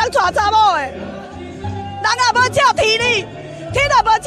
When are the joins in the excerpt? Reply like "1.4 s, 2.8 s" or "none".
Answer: none